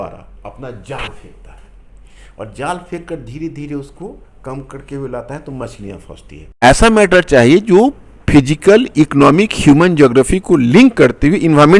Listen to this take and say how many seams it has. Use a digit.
1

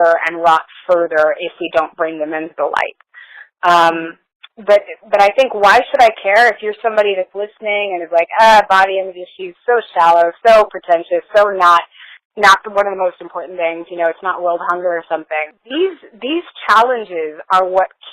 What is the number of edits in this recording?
1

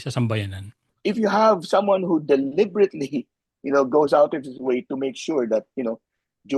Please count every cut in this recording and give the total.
1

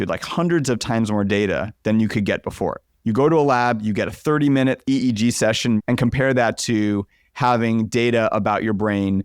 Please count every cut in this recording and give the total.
2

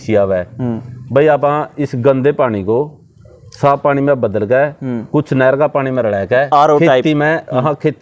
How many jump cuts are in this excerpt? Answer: 0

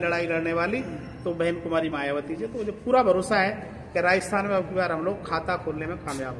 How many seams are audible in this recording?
0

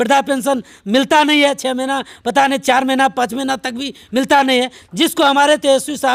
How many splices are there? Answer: 0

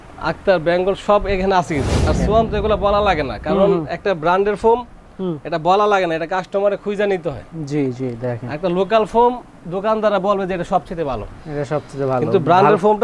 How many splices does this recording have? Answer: 1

